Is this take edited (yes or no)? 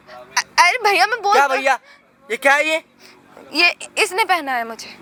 no